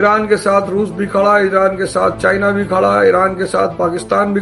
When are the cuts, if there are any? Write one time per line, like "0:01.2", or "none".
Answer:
none